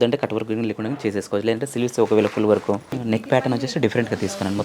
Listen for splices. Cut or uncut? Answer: cut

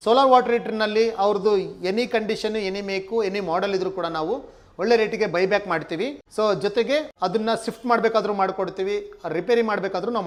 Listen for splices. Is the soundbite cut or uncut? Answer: uncut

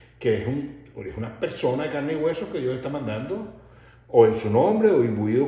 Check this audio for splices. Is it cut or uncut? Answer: uncut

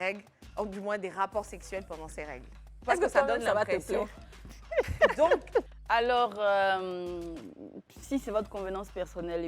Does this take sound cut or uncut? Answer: cut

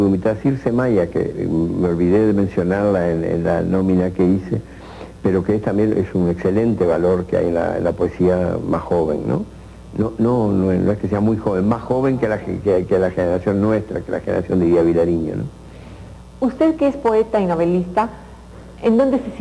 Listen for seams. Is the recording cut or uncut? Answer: cut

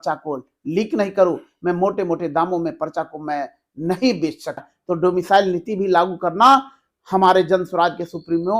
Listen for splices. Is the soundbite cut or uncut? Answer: cut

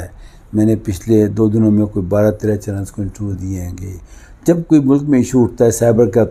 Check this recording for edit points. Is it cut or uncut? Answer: uncut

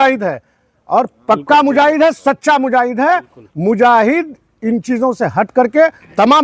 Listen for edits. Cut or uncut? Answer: uncut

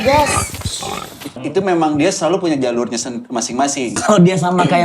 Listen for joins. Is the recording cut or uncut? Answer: cut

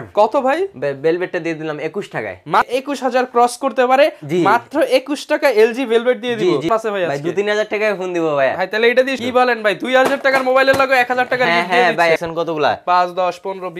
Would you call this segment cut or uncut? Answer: cut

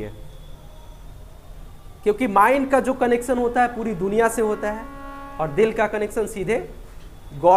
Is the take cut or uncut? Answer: uncut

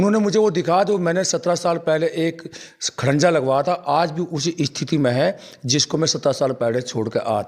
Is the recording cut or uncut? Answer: uncut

